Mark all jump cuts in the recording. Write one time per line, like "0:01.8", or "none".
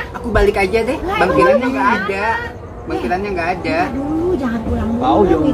none